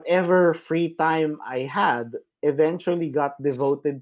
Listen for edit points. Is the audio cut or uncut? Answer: uncut